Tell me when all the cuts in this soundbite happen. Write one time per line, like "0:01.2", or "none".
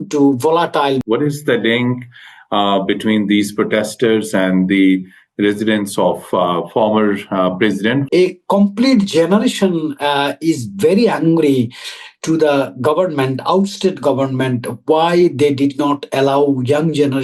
0:01.0
0:08.1